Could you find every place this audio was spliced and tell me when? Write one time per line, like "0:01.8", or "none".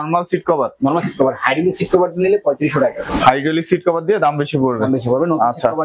none